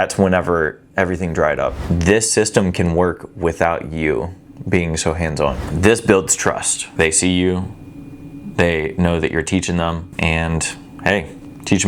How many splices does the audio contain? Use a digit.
2